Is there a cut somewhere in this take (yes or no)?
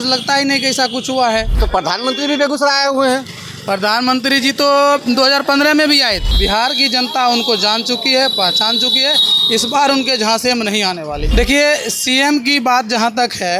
yes